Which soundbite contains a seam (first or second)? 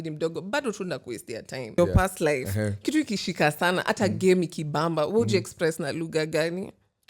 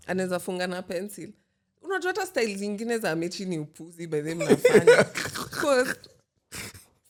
first